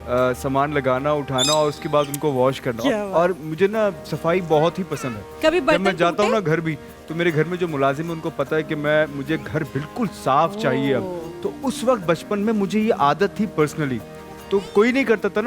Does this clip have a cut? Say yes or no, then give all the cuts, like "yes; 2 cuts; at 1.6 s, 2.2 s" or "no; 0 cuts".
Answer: no; 0 cuts